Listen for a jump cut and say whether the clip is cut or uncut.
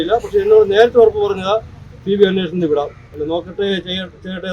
uncut